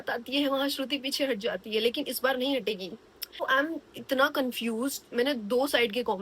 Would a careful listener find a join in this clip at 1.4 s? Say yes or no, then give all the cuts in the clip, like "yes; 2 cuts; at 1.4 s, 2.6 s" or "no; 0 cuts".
no; 1 cut; at 3.4 s